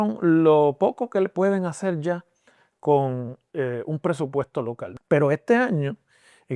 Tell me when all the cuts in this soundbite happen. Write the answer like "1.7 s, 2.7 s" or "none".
4.8 s